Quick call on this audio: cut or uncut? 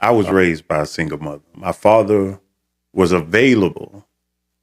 cut